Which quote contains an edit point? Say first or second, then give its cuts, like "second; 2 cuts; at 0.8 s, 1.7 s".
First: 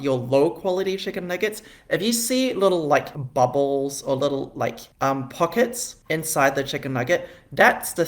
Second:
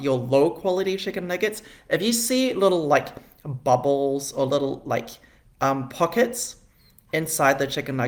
first; 3 cuts; at 3.2 s, 4.8 s, 5.9 s